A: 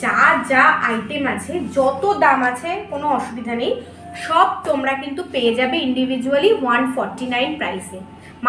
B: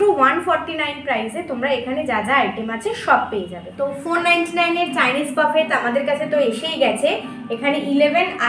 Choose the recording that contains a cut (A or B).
B